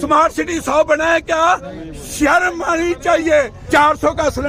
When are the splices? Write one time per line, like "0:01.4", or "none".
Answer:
0:03.6